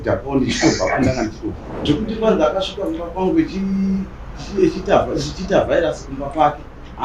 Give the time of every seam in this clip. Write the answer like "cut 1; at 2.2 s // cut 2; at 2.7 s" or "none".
cut 1; at 1.7 s